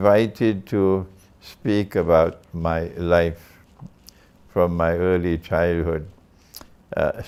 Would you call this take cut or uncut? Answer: uncut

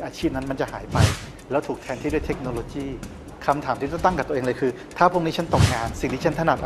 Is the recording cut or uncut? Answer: cut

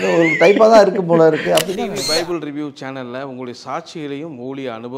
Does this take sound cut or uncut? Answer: cut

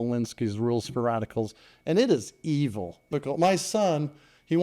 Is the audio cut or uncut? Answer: cut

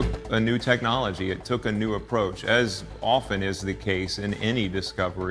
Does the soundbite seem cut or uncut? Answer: uncut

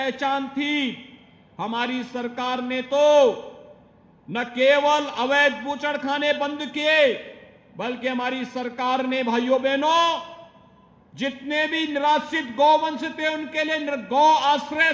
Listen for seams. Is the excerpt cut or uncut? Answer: uncut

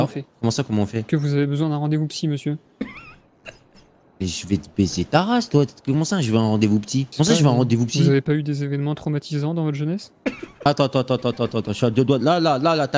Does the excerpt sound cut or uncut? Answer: uncut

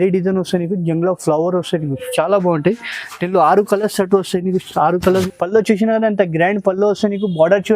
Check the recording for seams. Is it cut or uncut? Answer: cut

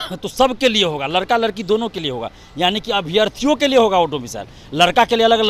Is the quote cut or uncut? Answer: uncut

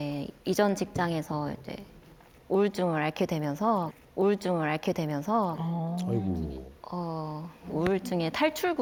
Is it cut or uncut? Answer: uncut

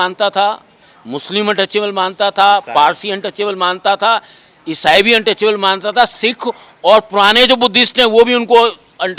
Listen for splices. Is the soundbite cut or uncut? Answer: uncut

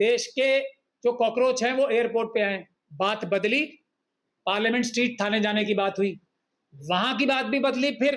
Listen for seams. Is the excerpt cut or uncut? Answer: cut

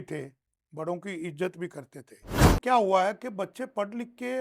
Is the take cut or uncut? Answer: cut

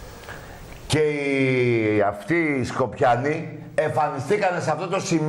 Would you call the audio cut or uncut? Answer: cut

